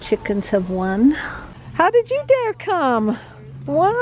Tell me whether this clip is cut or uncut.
cut